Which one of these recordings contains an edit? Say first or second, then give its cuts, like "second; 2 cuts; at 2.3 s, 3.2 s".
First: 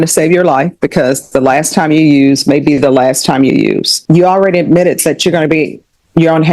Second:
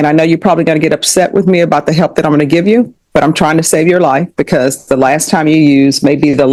first; 1 cut; at 3.9 s